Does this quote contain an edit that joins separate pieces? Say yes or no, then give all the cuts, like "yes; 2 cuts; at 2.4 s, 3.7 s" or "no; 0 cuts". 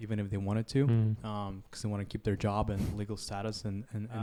no; 0 cuts